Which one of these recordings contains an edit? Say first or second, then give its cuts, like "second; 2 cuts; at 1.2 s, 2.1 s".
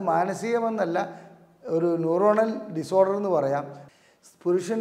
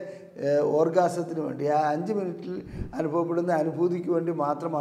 first; 1 cut; at 3.8 s